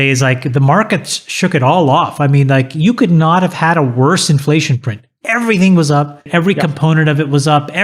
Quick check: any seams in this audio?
yes; 1 cut; at 6.3 s

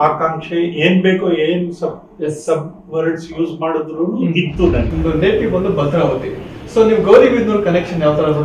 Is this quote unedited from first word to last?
no; 1 cut; at 4.9 s

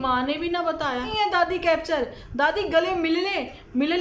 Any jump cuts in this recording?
yes; 1 cut; at 1.1 s

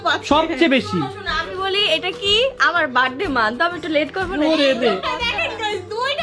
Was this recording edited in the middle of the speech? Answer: no; 0 cuts

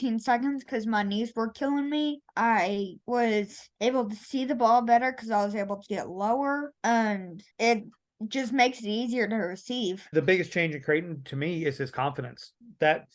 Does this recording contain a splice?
yes; 1 cut; at 10.0 s

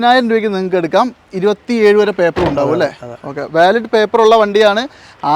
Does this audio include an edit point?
no; 0 cuts

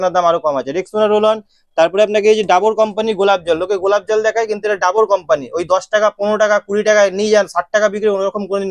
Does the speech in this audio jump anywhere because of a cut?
no; 0 cuts

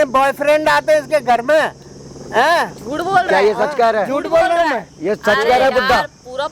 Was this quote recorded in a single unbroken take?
yes; 0 cuts

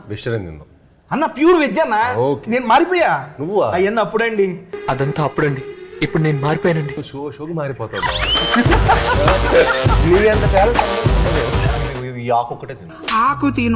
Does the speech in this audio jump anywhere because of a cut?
yes; 1 cut; at 11.7 s

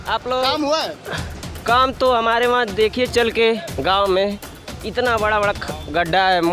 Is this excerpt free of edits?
yes; 0 cuts

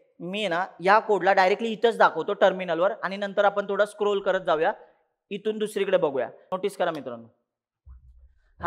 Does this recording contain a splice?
yes; 1 cut; at 6.4 s

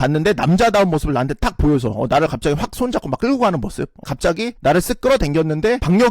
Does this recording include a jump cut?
yes; 1 cut; at 4.0 s

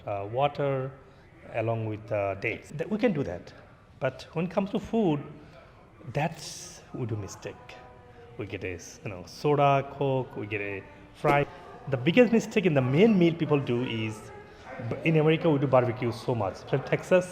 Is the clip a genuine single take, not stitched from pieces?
no; 2 cuts; at 2.6 s, 11.5 s

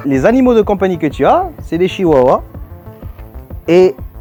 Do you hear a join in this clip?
no; 0 cuts

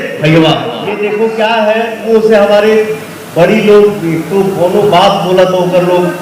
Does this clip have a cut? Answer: yes; 1 cut; at 1.0 s

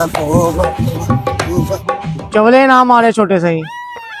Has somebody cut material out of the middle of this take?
no; 0 cuts

